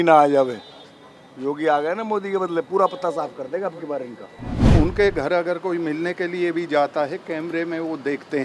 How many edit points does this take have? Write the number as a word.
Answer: one